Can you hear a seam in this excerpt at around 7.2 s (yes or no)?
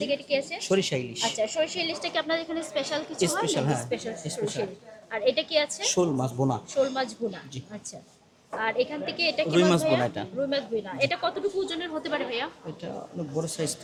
no